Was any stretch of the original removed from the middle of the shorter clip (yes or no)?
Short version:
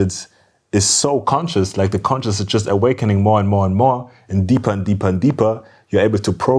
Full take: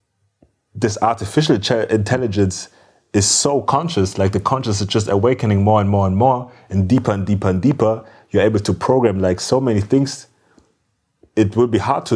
no